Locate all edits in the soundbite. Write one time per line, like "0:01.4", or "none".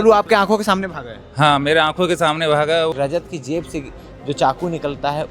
0:02.9